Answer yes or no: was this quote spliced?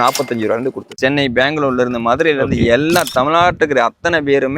yes